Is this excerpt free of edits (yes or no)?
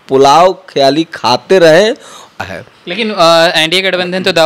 no